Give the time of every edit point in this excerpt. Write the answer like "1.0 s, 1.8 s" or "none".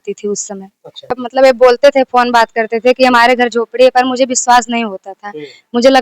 1.2 s